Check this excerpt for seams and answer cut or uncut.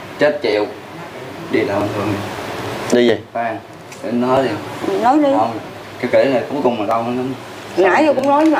uncut